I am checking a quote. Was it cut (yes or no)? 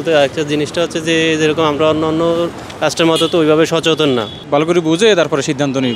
yes